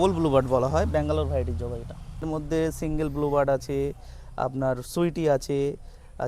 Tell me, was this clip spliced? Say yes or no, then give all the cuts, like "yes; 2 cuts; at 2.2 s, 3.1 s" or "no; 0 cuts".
yes; 1 cut; at 2.2 s